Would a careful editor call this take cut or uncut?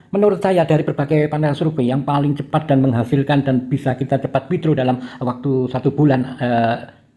uncut